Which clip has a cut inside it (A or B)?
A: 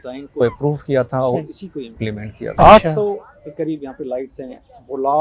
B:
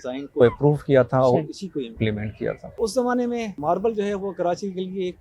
A